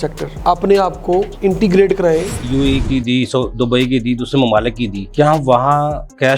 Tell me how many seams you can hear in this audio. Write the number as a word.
two